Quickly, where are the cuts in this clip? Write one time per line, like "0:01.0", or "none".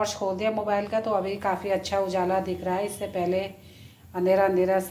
none